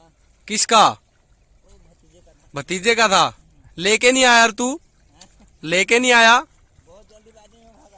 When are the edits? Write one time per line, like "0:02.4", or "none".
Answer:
none